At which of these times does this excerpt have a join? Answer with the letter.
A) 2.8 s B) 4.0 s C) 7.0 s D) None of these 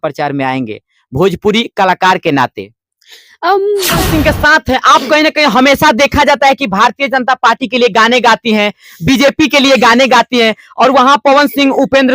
B